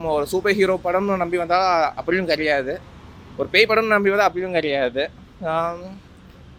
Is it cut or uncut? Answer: uncut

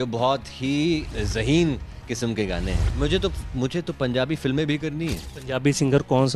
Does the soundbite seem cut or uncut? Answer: cut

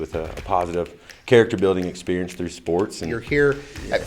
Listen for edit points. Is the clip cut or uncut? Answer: cut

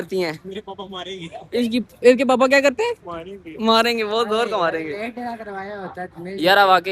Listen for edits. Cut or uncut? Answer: uncut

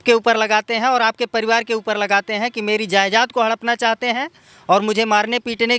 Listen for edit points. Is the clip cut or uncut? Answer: uncut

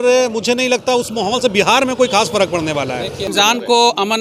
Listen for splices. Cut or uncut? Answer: cut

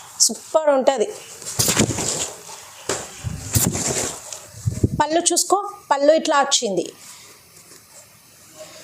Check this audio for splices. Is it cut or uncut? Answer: uncut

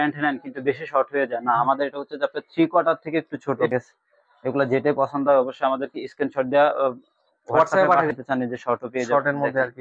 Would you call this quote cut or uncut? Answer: cut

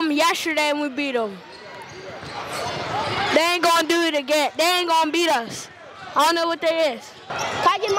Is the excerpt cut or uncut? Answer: uncut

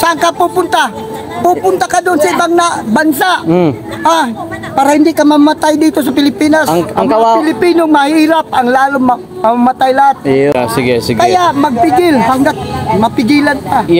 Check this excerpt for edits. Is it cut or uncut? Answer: uncut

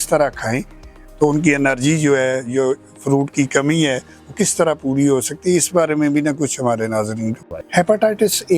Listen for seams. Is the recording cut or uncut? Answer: cut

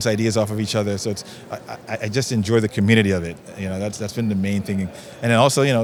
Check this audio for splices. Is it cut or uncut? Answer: uncut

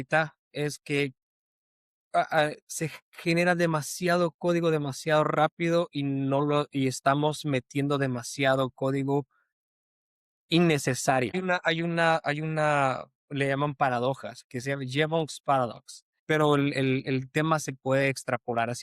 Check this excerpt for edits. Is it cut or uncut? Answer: cut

